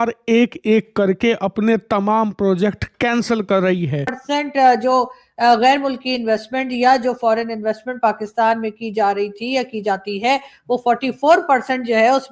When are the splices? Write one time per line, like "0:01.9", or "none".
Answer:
0:04.2